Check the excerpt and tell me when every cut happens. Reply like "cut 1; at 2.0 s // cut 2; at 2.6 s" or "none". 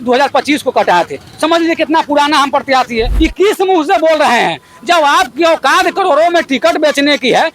cut 1; at 3.1 s